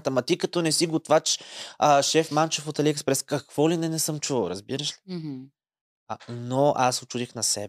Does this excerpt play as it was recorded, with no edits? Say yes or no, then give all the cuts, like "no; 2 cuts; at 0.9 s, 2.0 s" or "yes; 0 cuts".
yes; 0 cuts